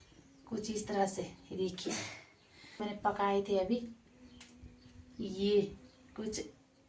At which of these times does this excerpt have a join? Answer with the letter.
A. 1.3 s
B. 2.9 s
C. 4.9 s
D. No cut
B